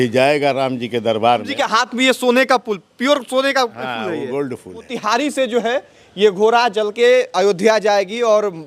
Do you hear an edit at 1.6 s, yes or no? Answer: yes